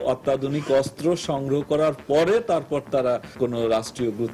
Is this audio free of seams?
no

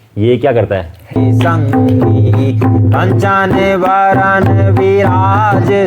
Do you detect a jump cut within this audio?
yes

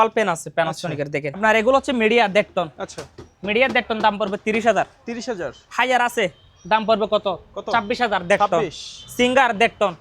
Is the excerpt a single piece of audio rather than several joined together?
no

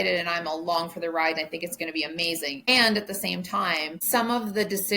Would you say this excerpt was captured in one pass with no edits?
no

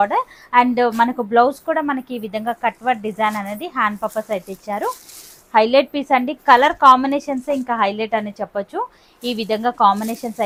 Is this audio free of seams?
yes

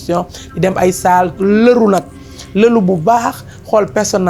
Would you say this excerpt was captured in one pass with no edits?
yes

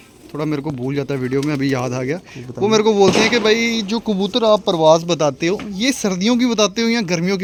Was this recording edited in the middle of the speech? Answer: no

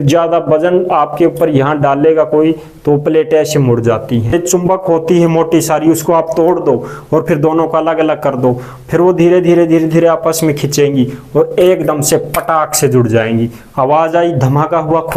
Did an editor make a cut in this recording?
yes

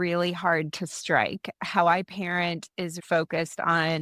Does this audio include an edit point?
yes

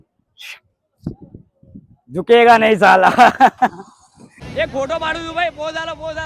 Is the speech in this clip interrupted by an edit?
yes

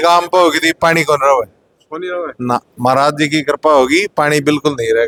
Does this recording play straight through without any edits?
yes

